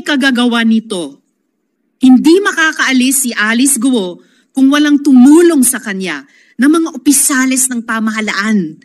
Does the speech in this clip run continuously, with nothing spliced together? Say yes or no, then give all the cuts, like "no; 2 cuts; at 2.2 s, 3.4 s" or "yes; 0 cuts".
yes; 0 cuts